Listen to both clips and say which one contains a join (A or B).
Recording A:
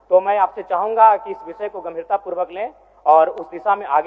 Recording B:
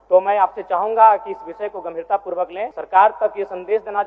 B